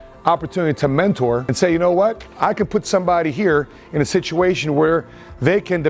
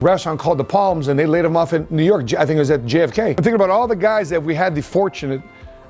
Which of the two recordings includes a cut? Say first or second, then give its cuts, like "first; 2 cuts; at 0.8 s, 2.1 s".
second; 1 cut; at 3.4 s